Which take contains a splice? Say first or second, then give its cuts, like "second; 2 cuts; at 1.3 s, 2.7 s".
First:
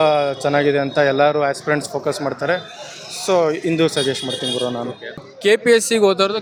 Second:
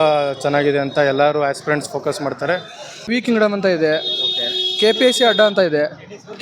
second; 1 cut; at 3.1 s